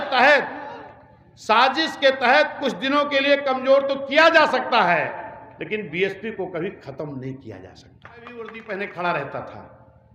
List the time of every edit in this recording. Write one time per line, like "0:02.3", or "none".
0:08.5